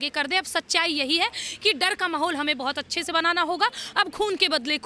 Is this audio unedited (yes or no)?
yes